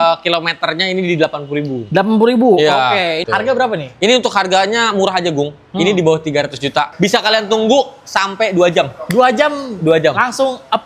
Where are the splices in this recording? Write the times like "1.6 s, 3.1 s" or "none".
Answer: 3.2 s, 6.9 s

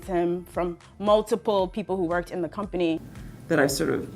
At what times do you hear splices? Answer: 3.0 s

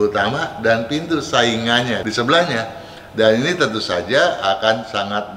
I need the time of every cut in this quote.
2.0 s

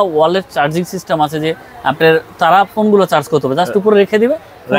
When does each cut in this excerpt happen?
none

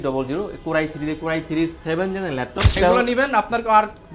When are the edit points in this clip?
2.8 s

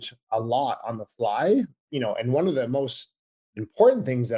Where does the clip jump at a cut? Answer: 1.8 s

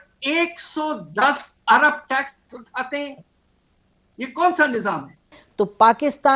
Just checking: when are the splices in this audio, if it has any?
5.4 s

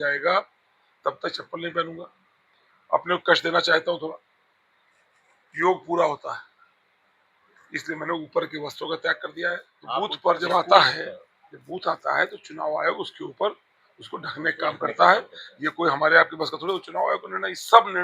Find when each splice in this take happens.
9.7 s

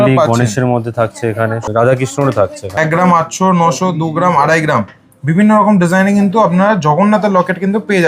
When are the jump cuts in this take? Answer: 1.6 s, 2.8 s

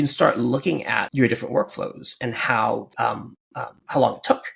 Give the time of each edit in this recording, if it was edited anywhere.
1.1 s, 2.9 s

